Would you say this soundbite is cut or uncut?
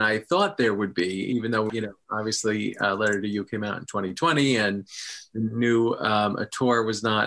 cut